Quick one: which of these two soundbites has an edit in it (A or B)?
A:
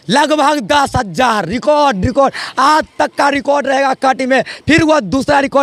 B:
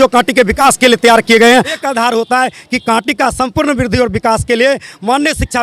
B